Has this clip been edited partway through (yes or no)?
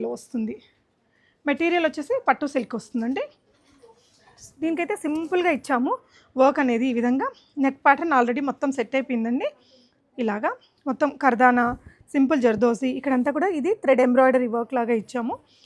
no